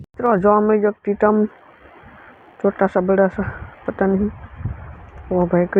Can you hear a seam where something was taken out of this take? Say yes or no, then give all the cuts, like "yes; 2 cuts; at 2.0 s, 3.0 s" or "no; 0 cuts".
no; 0 cuts